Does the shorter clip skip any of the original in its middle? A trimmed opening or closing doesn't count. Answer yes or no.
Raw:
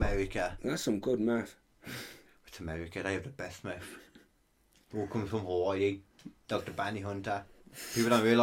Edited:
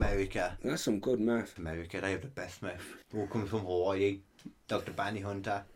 yes